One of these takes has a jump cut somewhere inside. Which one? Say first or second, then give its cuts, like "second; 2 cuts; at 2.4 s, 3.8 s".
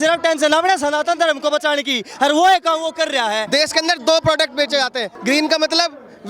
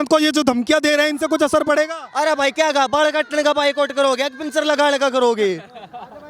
first; 2 cuts; at 3.4 s, 5.1 s